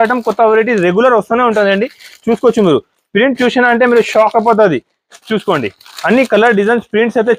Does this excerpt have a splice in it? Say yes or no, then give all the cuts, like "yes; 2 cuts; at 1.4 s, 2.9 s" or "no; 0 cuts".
no; 0 cuts